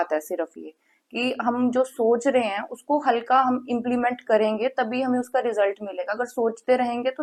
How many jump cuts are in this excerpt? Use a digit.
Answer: 0